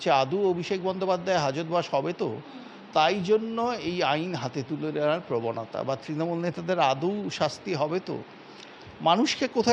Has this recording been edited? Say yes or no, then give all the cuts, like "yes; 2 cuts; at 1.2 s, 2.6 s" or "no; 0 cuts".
no; 0 cuts